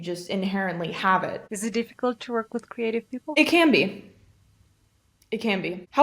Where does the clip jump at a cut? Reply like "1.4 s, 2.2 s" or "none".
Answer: 1.5 s, 3.3 s